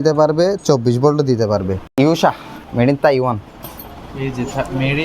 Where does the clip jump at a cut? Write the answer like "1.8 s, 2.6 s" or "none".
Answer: 1.8 s, 2.5 s